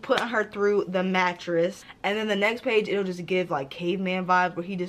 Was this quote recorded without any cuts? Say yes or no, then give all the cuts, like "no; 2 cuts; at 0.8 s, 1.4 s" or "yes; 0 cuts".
no; 1 cut; at 1.8 s